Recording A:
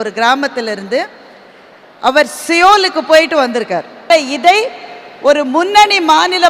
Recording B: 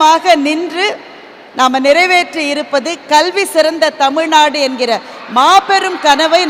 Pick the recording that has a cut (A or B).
A